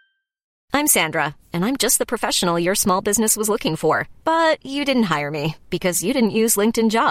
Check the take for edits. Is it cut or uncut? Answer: uncut